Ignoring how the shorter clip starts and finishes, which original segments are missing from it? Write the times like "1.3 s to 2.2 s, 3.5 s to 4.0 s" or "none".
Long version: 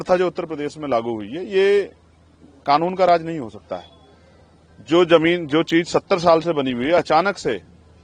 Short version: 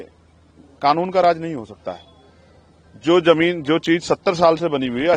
none